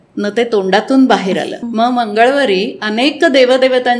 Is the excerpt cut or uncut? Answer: cut